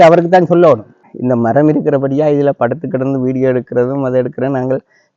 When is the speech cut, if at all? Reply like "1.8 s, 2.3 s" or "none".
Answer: 1.0 s